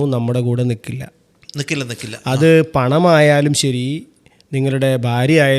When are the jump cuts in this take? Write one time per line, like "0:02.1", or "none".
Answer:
none